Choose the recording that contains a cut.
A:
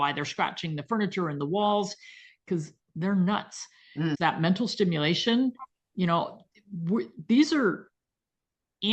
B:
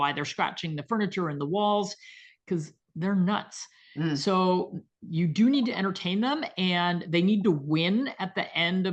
A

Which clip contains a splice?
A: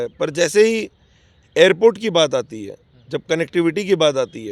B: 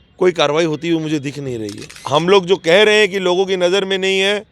B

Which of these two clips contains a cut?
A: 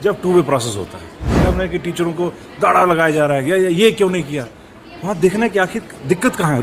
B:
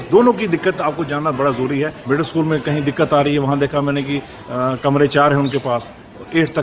A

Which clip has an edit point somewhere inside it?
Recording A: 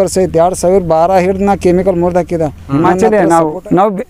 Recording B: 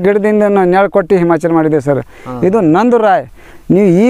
A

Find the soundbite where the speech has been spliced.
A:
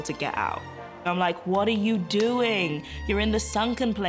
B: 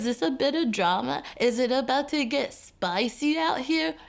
A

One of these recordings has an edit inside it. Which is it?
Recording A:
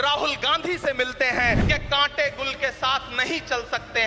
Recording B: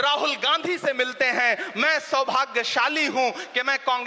A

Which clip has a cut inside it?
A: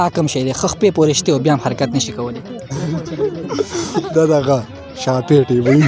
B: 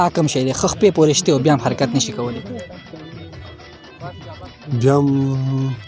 A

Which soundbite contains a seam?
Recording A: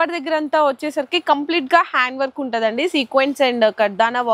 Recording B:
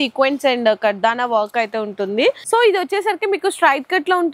B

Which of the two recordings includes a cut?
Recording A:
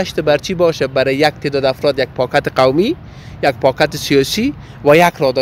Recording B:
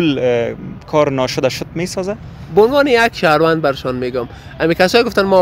B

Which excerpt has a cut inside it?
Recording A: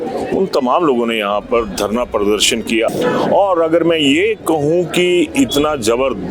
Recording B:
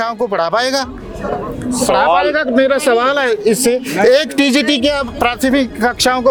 A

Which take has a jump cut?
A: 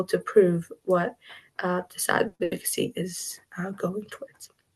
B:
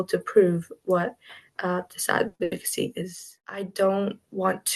B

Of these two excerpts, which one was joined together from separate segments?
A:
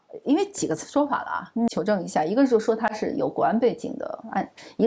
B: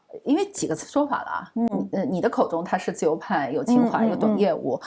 A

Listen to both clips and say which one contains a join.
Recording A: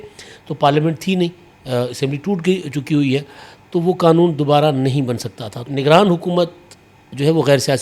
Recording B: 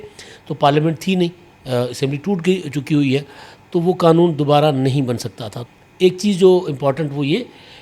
A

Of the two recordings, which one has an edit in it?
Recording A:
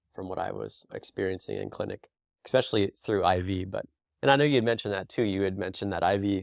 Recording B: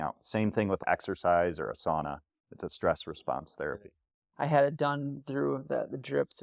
B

